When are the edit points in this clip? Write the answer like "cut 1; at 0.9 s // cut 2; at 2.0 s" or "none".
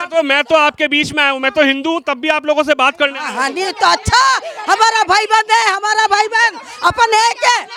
none

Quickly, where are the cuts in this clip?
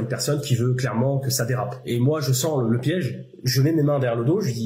none

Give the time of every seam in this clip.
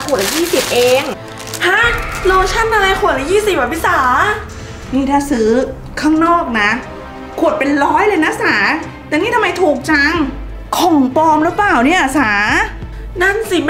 none

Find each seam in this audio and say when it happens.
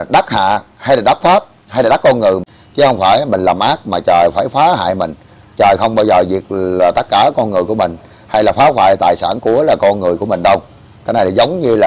cut 1; at 2.6 s

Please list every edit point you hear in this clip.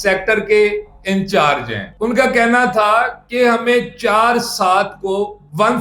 cut 1; at 1.9 s

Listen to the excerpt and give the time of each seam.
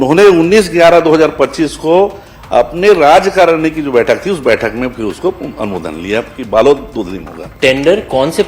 cut 1; at 7.4 s

